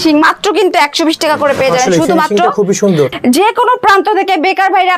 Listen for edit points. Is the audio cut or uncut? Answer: cut